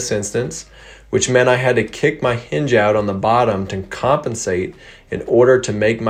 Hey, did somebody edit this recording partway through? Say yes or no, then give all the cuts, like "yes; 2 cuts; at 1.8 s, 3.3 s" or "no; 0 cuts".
no; 0 cuts